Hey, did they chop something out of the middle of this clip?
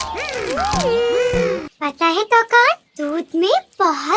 yes; 1 cut; at 1.7 s

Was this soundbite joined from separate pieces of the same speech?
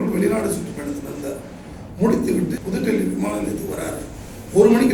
yes; 1 cut; at 2.6 s

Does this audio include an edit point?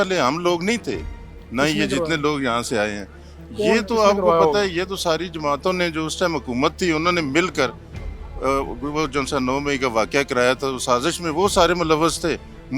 no; 0 cuts

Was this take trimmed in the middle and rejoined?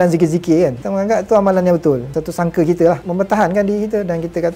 no; 0 cuts

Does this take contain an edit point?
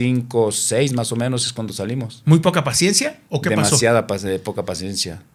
no; 0 cuts

